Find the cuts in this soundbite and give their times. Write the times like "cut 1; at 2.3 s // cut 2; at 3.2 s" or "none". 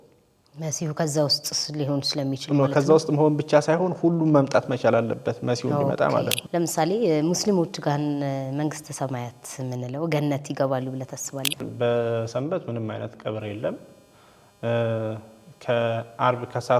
cut 1; at 6.4 s // cut 2; at 11.7 s